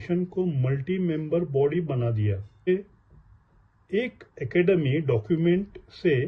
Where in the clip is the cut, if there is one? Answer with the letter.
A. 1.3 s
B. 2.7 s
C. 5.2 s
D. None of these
B